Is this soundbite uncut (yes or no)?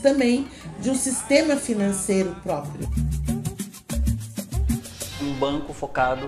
no